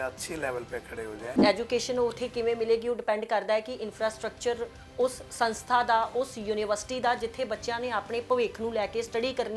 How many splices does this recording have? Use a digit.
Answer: 1